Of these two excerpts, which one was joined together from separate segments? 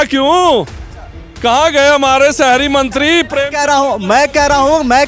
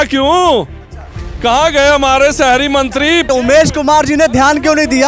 second; 1 cut; at 3.3 s

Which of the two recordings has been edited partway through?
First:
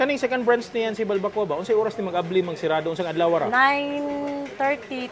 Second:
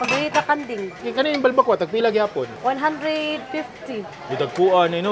second; 2 cuts; at 1.0 s, 2.5 s

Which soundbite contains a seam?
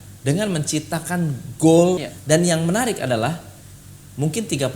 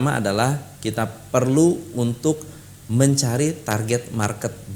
first; 1 cut; at 2.1 s

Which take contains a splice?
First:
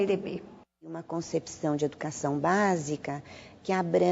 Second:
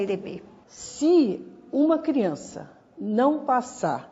first; 1 cut; at 1.0 s

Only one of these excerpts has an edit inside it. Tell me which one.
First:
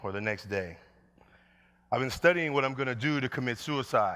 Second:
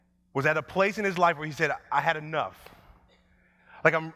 first; 1 cut; at 1.9 s

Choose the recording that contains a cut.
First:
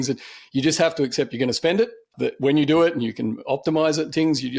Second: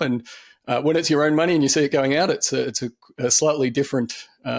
first; 1 cut; at 2.1 s

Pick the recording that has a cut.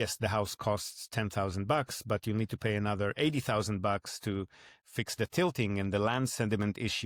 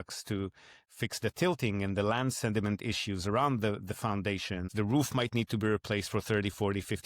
second; 1 cut; at 4.7 s

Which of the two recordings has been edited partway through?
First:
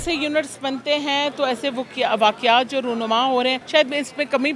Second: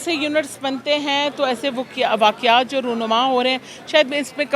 first; 1 cut; at 3.6 s

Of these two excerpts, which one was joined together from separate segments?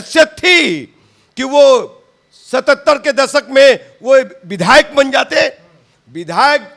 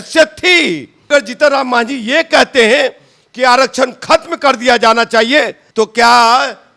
second; 2 cuts; at 1.1 s, 5.6 s

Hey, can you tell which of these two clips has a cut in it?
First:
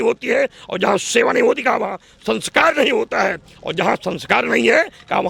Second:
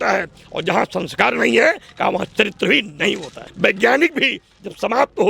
second; 1 cut; at 3.4 s

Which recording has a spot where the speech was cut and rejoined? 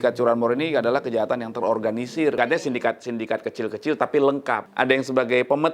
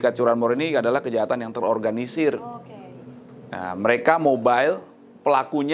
first; 2 cuts; at 2.4 s, 4.7 s

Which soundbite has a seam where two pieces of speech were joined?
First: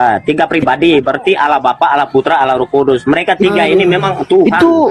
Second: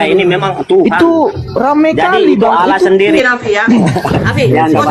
second; 1 cut; at 3.2 s

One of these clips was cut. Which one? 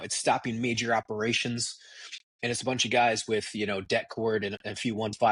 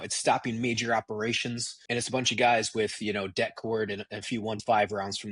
second; 1 cut; at 1.7 s

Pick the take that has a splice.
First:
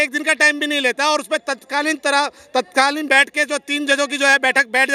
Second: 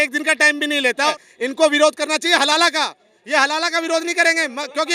second; 1 cut; at 1.1 s

